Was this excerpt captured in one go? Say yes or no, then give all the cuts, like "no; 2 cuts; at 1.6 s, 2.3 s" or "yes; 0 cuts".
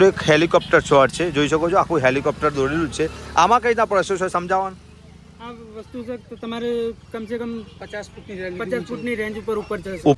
yes; 0 cuts